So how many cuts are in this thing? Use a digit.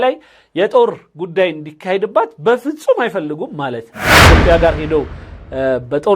1